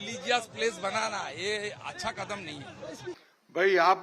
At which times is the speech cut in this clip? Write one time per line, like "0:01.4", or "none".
0:03.1